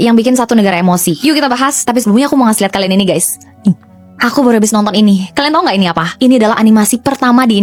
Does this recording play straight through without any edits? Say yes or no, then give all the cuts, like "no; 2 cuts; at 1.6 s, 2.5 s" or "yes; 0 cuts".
yes; 0 cuts